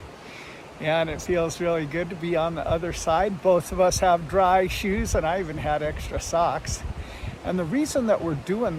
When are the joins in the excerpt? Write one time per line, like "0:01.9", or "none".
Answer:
none